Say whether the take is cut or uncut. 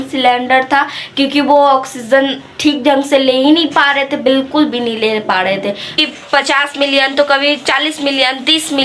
cut